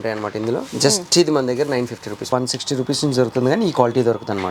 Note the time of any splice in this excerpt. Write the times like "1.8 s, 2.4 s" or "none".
2.3 s